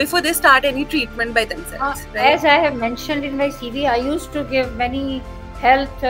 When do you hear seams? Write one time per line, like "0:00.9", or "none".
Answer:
none